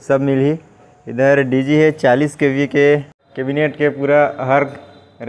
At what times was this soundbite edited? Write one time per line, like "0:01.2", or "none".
0:03.1